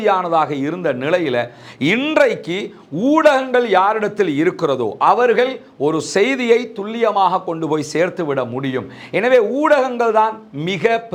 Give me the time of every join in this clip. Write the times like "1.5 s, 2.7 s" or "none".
none